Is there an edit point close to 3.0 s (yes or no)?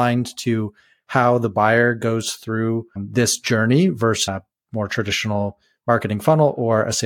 yes